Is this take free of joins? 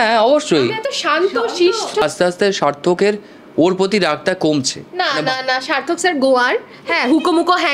no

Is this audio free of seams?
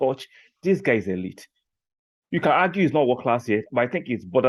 yes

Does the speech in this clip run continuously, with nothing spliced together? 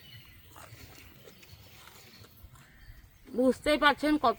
yes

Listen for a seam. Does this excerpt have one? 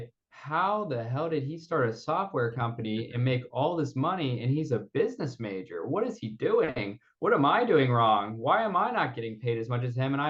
no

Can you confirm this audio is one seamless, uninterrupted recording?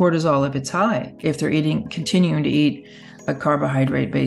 no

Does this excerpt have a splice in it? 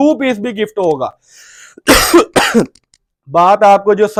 no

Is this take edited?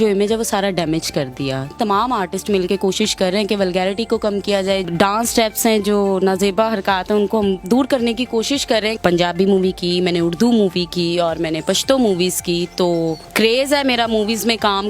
yes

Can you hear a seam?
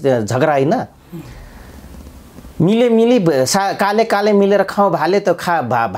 no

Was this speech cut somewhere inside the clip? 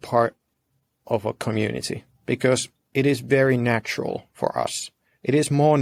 no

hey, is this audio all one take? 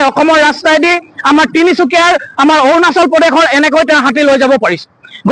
yes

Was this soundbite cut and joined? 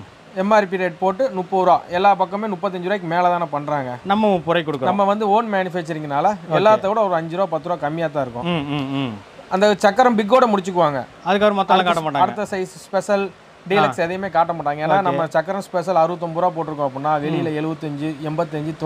no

